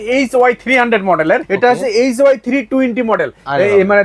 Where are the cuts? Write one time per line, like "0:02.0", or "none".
0:01.5